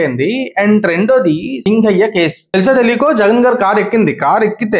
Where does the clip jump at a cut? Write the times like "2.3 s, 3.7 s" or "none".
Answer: 1.5 s, 2.4 s